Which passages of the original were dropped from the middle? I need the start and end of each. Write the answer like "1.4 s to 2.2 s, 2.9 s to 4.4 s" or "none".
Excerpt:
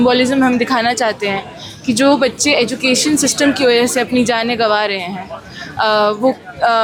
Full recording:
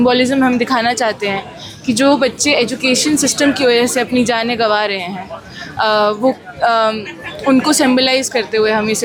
none